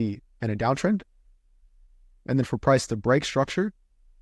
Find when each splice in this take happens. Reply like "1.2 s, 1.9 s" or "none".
none